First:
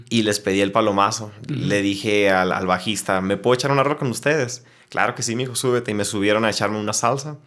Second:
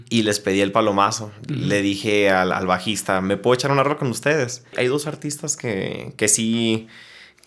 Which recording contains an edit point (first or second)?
second